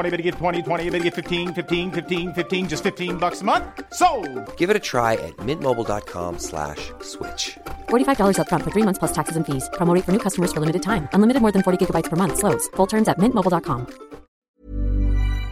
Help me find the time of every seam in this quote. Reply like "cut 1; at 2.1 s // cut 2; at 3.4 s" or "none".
cut 1; at 14.4 s